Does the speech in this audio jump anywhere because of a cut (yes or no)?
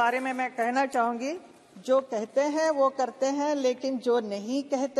no